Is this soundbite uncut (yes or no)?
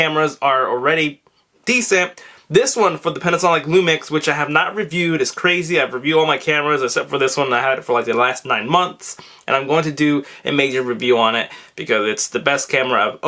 no